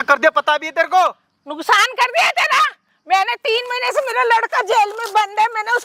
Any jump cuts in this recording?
no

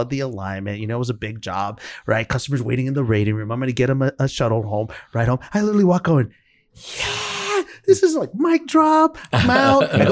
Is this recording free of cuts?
yes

